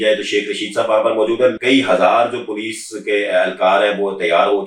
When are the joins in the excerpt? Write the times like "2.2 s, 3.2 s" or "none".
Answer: 1.6 s